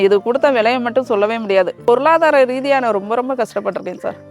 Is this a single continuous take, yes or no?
no